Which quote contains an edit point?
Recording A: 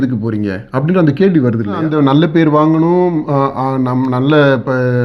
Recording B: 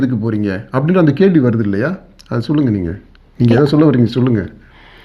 A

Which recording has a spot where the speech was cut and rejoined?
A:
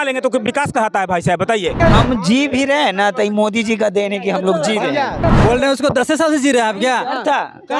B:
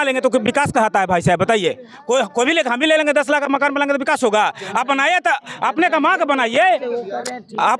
A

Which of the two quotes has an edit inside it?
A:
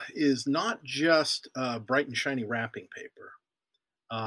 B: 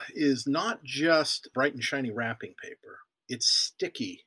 B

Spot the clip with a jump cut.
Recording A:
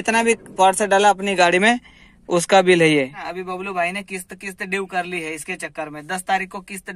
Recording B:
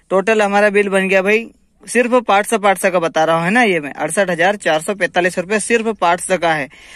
A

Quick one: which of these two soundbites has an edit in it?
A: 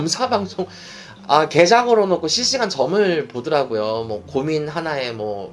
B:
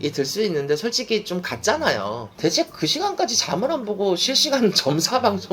B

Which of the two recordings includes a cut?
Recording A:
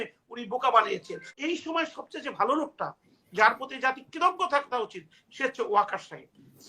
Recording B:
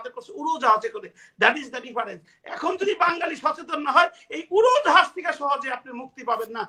A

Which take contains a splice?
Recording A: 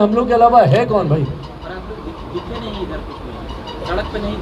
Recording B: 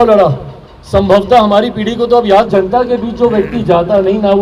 B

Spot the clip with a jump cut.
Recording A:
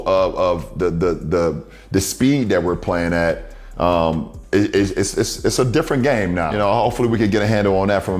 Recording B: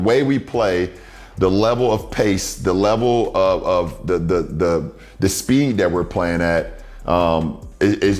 A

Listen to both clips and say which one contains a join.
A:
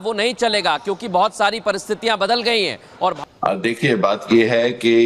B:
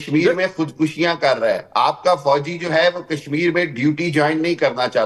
A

